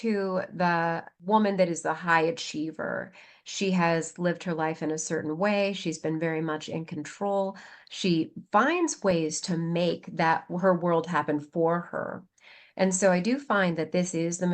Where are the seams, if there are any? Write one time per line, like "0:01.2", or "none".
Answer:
0:01.1